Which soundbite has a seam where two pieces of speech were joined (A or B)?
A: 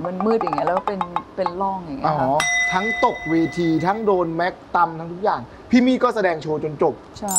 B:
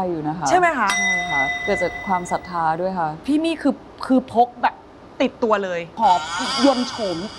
A